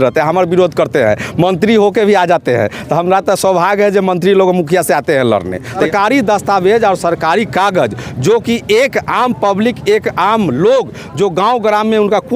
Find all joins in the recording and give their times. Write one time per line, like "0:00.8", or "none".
0:05.8